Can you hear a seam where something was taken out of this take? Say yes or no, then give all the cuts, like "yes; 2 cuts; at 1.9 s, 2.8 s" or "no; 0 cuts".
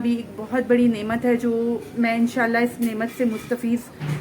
no; 0 cuts